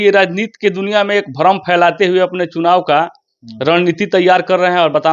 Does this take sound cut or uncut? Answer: uncut